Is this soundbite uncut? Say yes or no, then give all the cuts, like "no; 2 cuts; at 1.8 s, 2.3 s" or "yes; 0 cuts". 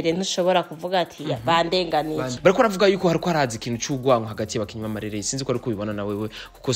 no; 1 cut; at 2.3 s